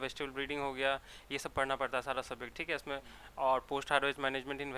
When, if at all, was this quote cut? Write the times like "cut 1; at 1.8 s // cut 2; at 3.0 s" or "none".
none